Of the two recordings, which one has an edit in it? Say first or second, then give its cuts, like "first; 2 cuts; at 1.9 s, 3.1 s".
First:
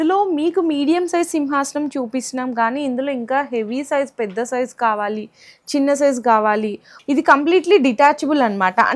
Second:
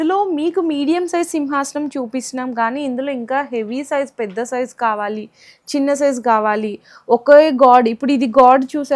first; 1 cut; at 6.9 s